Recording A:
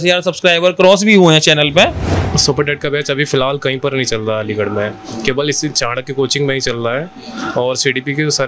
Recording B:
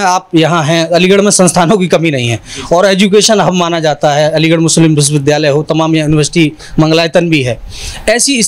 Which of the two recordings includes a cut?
A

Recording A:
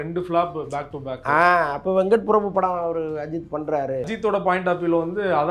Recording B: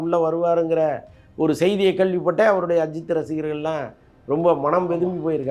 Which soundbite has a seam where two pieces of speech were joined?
A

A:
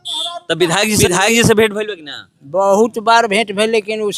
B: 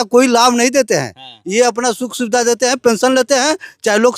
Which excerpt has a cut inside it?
A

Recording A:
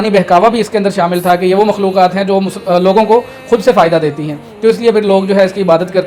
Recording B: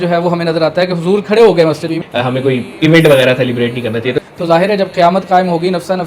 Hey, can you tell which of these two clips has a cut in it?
B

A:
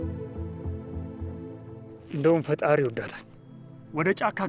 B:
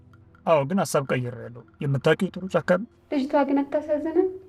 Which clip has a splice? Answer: B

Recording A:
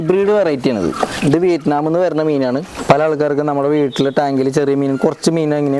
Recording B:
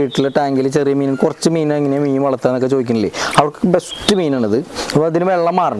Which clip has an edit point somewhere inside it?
A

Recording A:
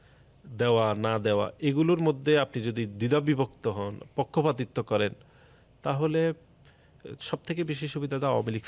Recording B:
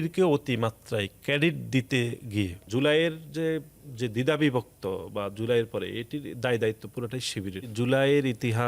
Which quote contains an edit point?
B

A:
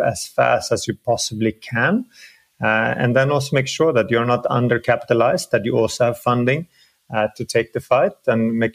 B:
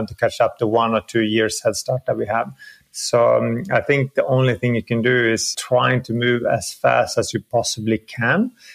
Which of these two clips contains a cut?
B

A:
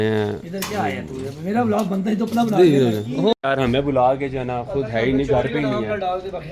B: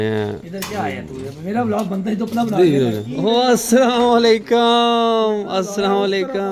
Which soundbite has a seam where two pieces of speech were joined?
A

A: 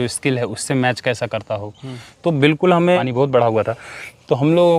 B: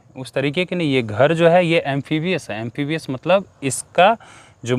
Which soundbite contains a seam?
A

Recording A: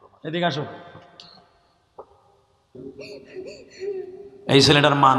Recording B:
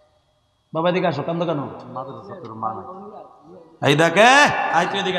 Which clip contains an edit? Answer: A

